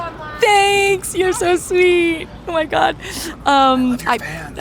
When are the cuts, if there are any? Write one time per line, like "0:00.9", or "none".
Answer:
none

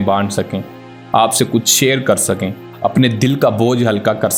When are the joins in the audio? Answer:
none

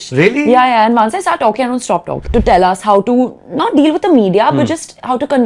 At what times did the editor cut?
0:02.2

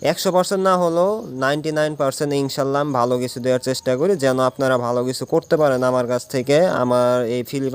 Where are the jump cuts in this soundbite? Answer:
none

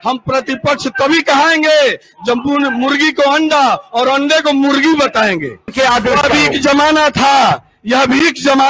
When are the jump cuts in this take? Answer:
0:05.7

